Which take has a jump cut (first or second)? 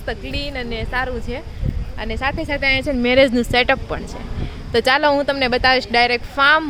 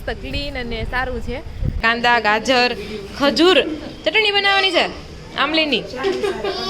second